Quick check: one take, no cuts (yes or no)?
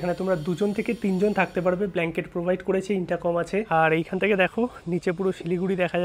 no